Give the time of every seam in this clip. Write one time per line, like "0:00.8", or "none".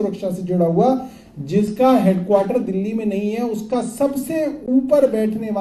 none